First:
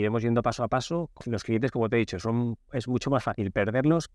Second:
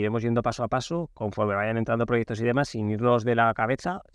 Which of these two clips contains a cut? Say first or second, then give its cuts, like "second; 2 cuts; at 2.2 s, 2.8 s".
first; 1 cut; at 1.2 s